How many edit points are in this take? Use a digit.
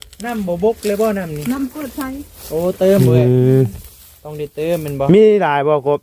0